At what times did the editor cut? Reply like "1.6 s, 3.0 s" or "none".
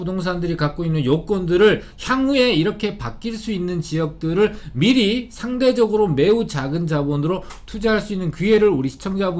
none